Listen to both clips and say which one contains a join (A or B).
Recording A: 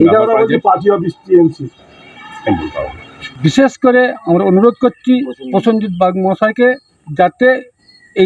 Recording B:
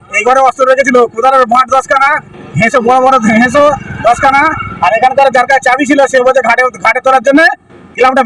A